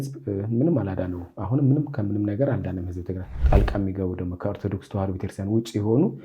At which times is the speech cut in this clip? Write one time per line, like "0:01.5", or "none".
0:03.3